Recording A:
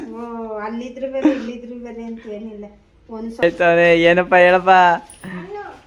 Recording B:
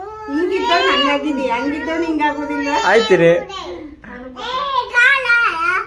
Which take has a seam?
A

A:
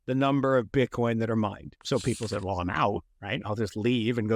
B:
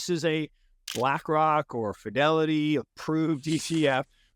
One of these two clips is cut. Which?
A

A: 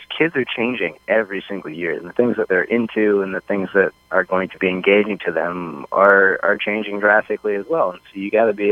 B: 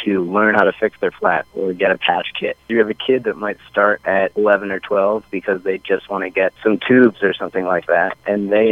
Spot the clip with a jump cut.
B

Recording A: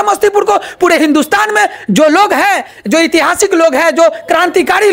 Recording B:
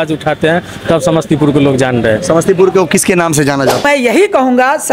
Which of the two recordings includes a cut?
B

